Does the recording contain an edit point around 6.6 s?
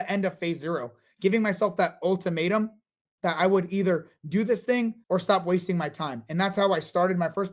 no; 0 cuts

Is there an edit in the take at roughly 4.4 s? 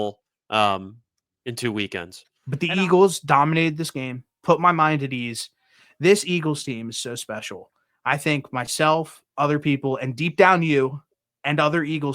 no; 1 cut; at 2.3 s

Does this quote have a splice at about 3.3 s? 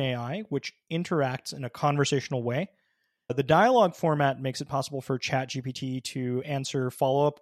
yes; 1 cut; at 3.3 s

